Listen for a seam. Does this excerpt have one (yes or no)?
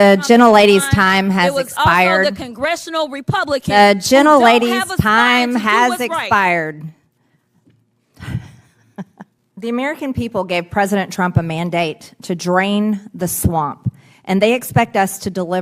no